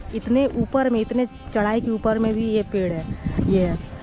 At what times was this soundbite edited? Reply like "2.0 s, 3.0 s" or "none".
none